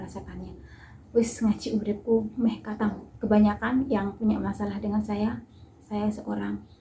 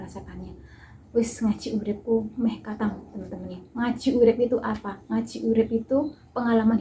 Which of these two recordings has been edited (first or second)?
first